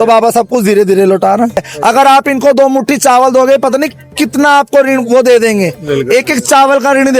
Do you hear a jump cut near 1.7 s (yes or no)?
yes